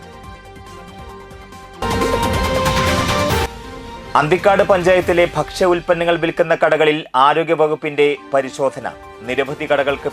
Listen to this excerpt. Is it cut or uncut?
cut